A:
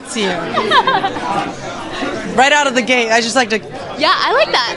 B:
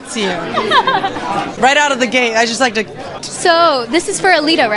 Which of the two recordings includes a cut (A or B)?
B